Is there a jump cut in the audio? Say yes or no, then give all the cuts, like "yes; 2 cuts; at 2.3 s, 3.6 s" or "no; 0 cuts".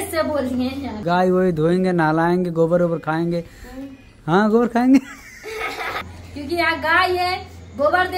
yes; 2 cuts; at 1.0 s, 6.0 s